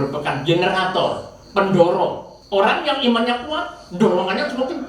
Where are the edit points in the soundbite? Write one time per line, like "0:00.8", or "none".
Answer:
0:02.3

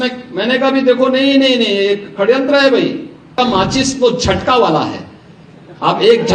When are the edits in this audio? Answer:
0:03.3

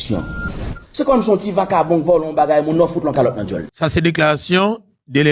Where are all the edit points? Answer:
0:03.7

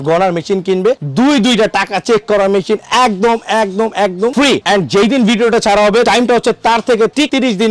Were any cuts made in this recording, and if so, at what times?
none

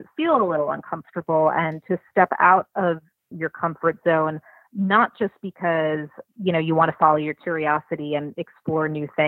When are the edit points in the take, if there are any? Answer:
0:03.4
0:06.2

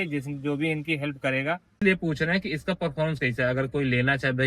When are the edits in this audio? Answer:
0:01.8

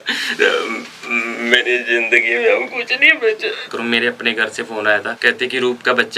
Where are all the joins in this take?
0:03.7
0:05.1

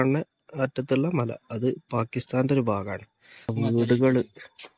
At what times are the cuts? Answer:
0:03.5

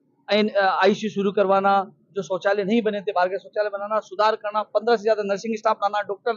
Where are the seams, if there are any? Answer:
none

